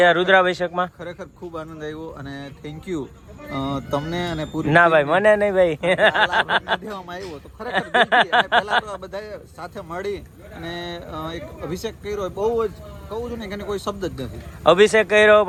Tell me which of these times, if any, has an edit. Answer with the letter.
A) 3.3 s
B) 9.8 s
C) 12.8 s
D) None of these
D